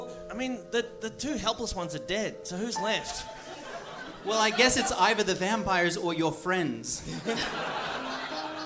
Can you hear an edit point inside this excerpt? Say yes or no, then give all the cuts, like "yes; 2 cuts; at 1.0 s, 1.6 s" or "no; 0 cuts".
no; 0 cuts